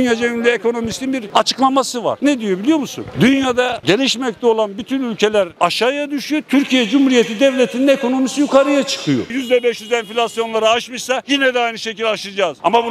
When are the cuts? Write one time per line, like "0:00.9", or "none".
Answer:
0:01.2
0:02.2
0:09.3